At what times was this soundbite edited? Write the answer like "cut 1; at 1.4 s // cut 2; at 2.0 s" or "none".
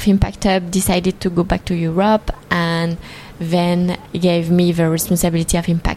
cut 1; at 4.0 s